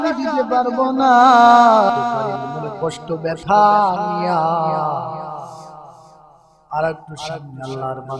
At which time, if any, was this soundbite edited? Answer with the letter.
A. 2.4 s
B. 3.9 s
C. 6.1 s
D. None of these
A